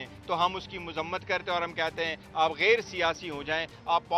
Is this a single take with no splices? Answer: yes; 0 cuts

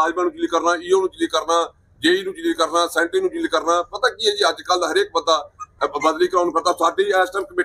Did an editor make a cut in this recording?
no; 0 cuts

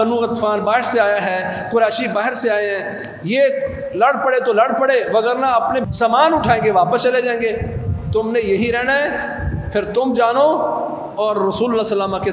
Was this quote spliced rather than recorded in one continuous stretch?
yes; 1 cut; at 5.9 s

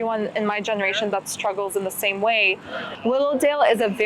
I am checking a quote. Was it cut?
yes; 1 cut; at 2.9 s

